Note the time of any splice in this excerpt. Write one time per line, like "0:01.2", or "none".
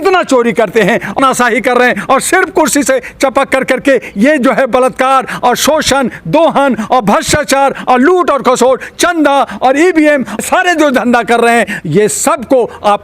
0:01.2
0:10.4